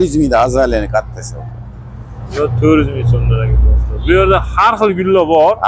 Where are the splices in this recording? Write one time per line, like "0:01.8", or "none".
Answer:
none